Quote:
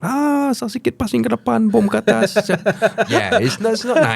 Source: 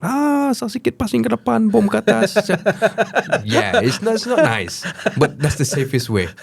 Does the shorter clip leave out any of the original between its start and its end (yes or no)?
yes